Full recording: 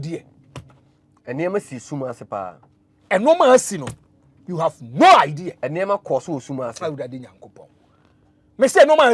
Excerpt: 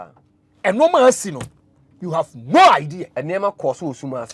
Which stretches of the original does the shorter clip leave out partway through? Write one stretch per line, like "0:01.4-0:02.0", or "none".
none